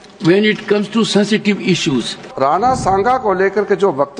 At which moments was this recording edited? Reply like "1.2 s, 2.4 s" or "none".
2.2 s